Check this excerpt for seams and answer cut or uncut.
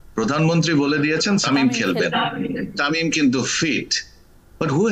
cut